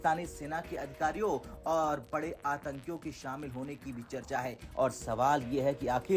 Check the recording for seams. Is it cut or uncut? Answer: uncut